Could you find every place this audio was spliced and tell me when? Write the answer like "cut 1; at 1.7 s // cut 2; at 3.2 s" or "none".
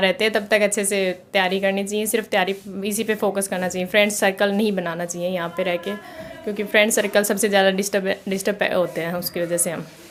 none